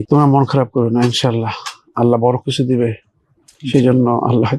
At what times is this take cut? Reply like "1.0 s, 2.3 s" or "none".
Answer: none